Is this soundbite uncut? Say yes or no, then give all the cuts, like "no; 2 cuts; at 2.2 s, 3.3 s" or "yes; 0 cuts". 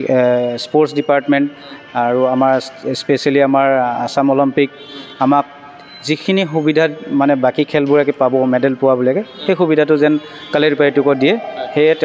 yes; 0 cuts